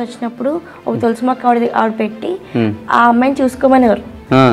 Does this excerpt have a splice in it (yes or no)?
no